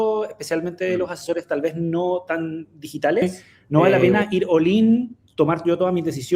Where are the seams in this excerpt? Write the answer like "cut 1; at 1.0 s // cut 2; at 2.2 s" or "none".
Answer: cut 1; at 3.2 s